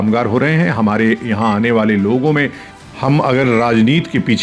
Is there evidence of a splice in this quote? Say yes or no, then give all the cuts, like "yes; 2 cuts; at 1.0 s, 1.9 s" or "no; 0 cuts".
yes; 1 cut; at 2.6 s